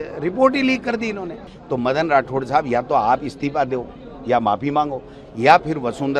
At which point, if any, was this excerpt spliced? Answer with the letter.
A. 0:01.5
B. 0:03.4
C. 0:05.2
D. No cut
A